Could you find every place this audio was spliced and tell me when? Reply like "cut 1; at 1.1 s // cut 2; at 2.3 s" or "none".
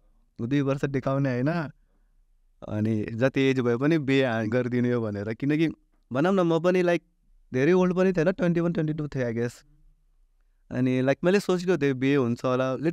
none